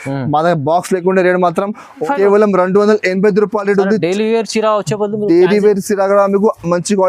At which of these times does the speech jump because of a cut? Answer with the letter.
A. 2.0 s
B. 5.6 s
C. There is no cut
A